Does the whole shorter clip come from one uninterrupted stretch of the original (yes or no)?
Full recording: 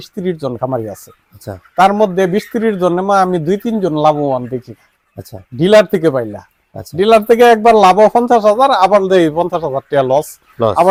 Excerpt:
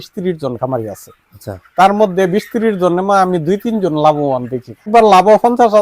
no